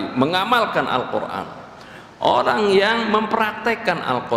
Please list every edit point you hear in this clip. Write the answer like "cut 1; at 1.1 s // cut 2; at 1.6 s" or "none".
none